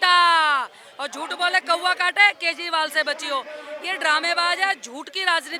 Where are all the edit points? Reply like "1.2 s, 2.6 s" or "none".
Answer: none